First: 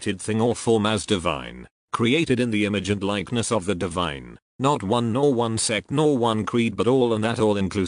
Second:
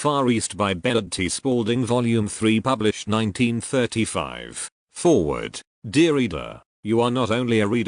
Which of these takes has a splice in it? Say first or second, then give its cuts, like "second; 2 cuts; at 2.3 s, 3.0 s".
second; 1 cut; at 2.2 s